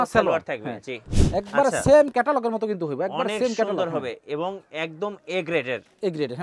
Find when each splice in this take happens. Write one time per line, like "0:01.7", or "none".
0:01.1